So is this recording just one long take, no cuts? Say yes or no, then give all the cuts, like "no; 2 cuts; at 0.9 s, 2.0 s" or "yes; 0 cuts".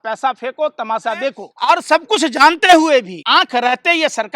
no; 2 cuts; at 1.5 s, 3.2 s